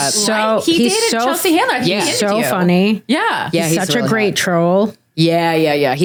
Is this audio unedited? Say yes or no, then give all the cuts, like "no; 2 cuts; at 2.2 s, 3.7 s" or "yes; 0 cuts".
yes; 0 cuts